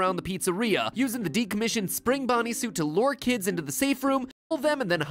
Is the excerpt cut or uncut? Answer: uncut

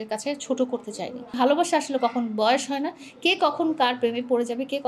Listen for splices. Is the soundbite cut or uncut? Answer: cut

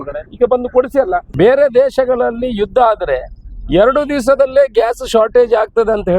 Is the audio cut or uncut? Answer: cut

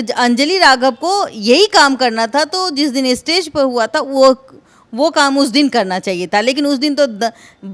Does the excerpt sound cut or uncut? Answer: uncut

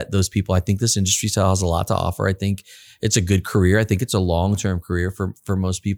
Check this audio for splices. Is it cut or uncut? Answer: uncut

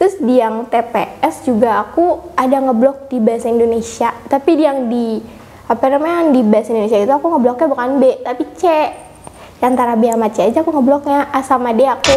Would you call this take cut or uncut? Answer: uncut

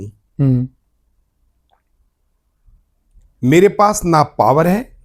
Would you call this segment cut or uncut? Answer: uncut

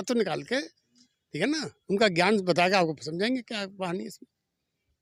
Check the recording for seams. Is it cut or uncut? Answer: uncut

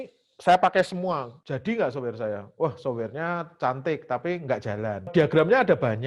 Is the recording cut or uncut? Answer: cut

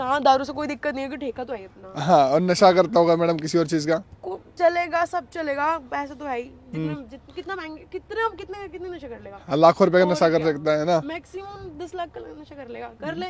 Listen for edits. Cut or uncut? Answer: uncut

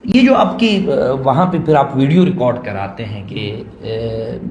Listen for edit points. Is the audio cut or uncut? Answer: uncut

